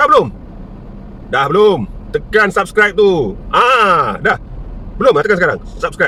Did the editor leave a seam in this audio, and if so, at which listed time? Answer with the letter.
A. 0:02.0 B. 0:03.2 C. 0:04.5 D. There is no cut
D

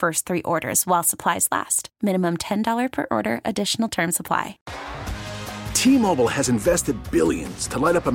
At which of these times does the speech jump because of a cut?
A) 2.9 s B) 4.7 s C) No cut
B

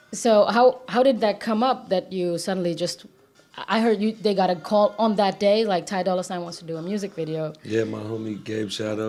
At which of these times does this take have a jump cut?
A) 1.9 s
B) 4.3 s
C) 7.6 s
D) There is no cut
D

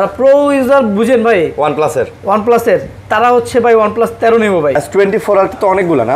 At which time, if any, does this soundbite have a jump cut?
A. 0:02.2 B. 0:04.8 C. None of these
B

